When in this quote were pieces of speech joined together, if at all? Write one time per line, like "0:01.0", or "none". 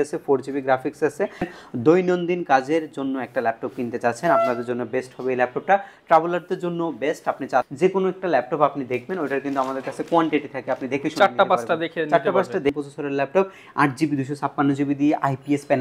0:01.5
0:07.7
0:12.7